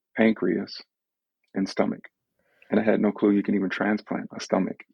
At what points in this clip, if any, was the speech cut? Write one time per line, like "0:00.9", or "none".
0:02.3